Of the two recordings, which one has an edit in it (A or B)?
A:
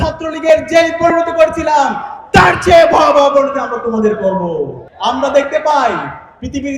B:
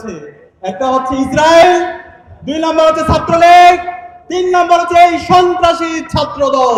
A